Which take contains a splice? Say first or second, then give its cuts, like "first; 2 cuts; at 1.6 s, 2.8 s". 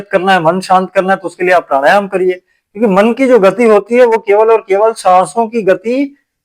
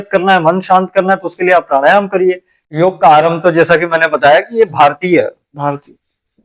second; 1 cut; at 2.6 s